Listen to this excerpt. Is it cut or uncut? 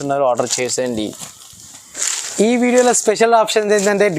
cut